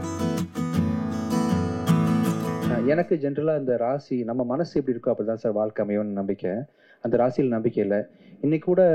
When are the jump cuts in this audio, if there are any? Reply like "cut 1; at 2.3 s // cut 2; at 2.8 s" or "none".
cut 1; at 2.7 s